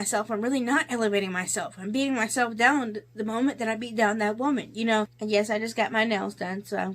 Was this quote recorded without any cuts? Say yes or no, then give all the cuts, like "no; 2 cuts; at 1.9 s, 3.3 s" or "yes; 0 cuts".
no; 1 cut; at 5.2 s